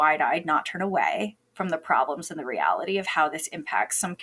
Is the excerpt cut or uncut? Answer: uncut